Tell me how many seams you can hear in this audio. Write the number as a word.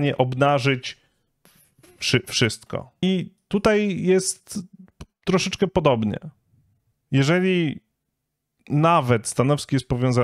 one